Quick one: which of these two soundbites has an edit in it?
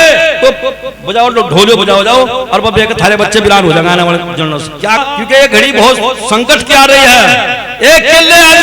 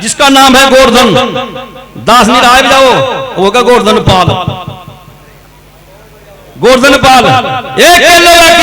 first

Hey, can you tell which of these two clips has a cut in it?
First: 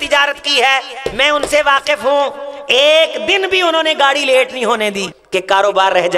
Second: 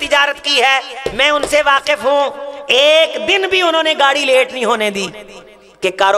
first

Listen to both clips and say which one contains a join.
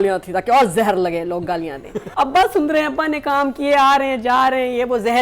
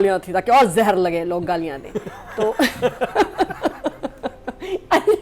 first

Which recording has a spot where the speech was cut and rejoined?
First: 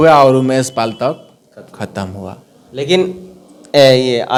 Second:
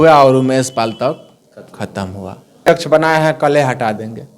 second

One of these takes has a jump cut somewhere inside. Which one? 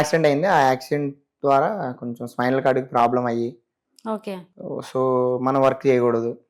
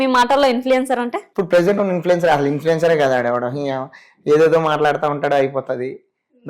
second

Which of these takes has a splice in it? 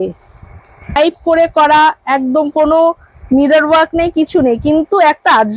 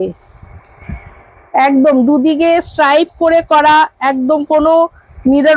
first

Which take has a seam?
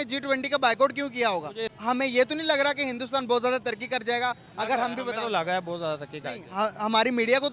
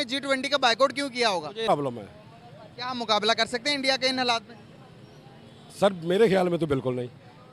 second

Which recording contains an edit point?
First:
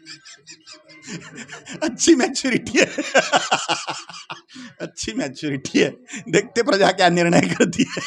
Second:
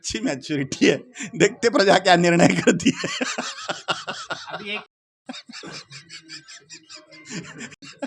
first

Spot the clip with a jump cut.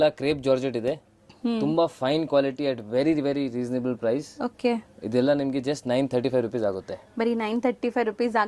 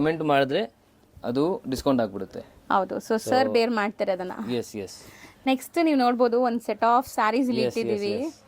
second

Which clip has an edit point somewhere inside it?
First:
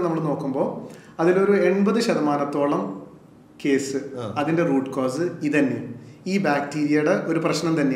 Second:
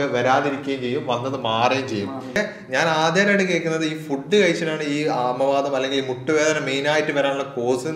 second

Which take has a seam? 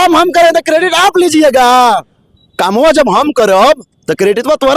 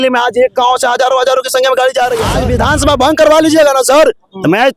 second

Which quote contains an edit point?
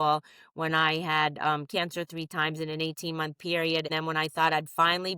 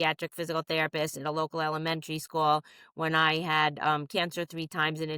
first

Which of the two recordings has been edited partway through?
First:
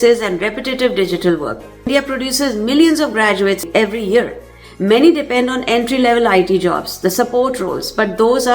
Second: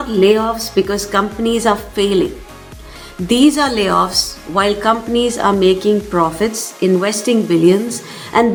first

